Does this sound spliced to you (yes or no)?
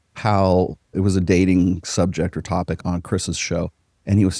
yes